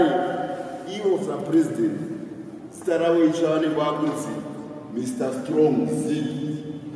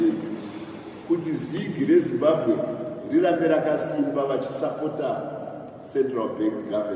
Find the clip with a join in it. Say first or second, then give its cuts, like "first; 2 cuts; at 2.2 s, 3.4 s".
first; 1 cut; at 3.2 s